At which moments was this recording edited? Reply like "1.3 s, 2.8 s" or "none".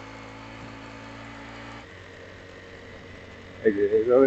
1.8 s